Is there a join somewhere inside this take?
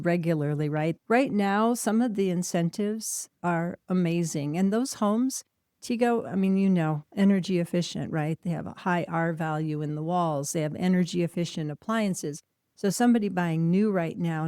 yes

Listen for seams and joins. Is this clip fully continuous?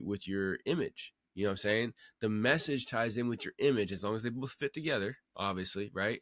yes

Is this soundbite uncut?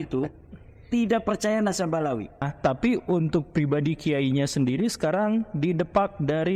no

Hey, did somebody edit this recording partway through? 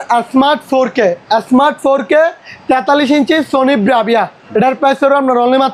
yes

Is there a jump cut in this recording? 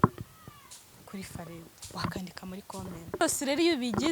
yes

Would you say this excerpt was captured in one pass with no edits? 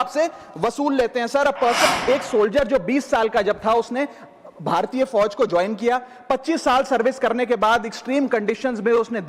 no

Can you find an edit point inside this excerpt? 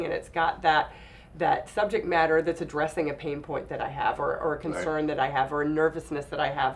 no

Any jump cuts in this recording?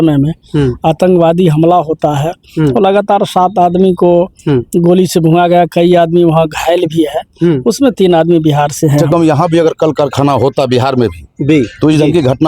yes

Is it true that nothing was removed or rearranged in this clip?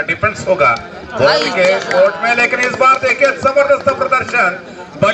yes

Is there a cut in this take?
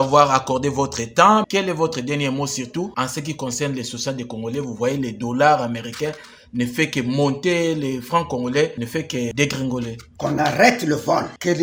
no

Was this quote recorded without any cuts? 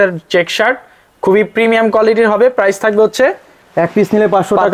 yes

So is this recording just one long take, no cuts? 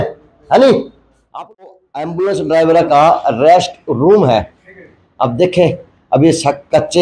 no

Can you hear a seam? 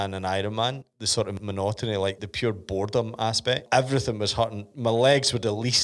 yes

